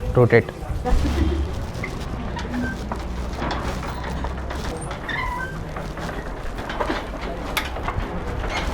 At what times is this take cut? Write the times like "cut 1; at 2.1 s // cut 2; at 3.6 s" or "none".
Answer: none

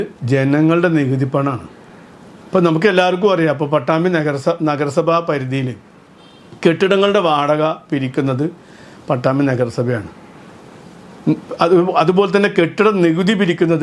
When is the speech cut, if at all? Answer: none

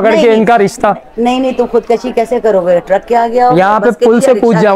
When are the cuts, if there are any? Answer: none

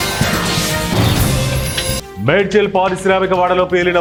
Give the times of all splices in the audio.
none

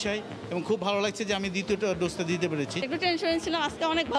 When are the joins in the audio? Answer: cut 1; at 2.8 s

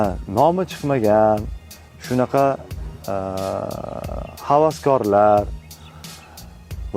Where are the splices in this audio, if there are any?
none

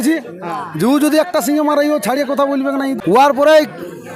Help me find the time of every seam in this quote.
cut 1; at 3.0 s

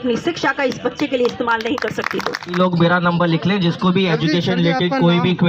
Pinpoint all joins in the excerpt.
cut 1; at 2.4 s

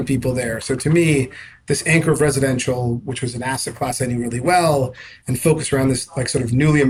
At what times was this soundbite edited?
none

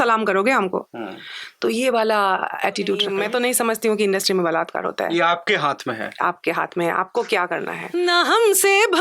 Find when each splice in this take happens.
cut 1; at 3.1 s // cut 2; at 7.8 s

